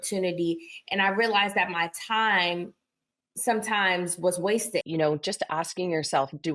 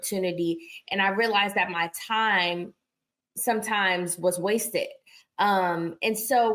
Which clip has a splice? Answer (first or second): first